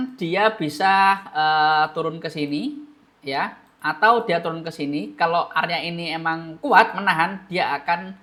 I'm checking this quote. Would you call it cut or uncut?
uncut